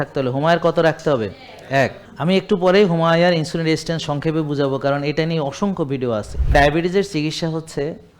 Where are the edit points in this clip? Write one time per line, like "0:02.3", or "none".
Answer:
0:02.1
0:06.3